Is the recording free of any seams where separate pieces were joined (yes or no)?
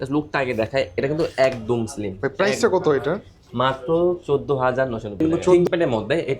no